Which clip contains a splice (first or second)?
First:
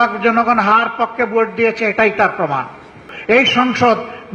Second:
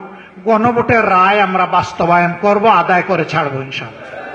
first